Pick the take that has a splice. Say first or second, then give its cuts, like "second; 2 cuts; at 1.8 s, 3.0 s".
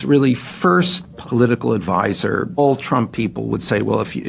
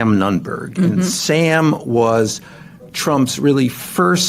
first; 1 cut; at 2.6 s